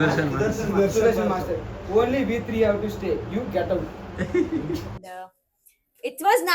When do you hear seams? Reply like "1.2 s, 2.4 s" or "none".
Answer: 5.0 s